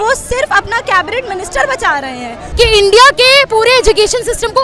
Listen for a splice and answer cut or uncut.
cut